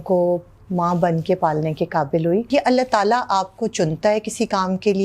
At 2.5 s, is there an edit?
yes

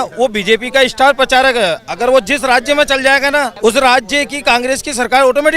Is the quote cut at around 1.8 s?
no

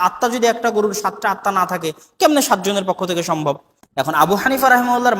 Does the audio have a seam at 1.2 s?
no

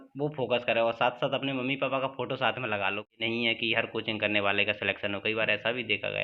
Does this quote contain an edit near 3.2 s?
yes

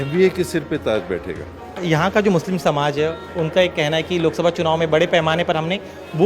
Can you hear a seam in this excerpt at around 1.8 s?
yes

